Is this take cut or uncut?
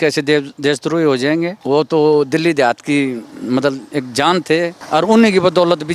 cut